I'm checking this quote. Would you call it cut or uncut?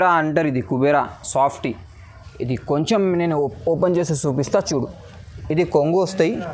uncut